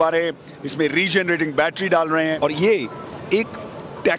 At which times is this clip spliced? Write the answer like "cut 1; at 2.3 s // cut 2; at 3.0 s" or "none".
cut 1; at 2.4 s